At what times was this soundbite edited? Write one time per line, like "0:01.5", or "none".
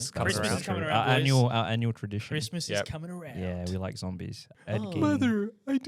0:04.5